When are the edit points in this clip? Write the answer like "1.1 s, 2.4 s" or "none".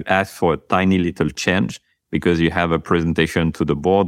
none

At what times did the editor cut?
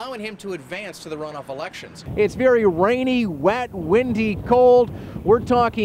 2.0 s

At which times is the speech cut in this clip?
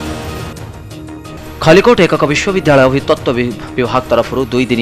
none

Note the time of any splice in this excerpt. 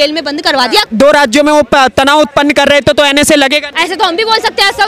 0.9 s, 3.7 s

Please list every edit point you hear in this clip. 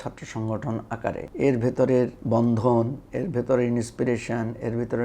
1.3 s, 2.2 s

